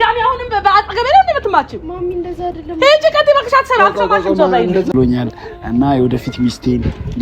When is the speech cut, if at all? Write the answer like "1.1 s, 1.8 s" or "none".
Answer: 4.9 s